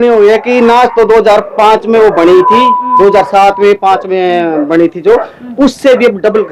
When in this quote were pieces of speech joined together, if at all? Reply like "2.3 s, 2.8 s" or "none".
none